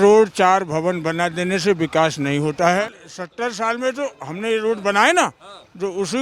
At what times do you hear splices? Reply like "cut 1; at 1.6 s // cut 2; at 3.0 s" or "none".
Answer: cut 1; at 2.9 s